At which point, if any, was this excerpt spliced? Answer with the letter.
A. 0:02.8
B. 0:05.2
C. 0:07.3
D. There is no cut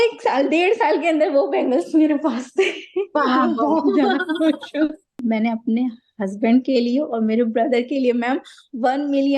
B